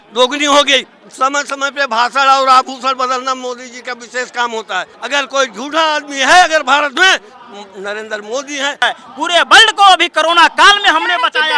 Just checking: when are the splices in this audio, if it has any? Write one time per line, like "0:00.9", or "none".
0:01.0
0:05.0
0:08.8